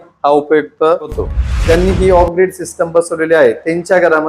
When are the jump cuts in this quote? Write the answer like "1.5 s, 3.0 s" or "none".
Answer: 1.6 s